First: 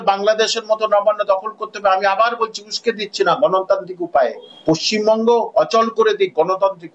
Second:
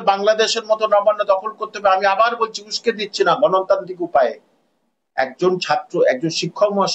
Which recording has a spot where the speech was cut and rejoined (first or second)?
first